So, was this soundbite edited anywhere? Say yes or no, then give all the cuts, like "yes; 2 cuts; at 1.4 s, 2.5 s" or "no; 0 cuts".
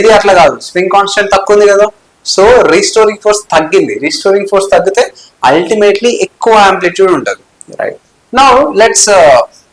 no; 0 cuts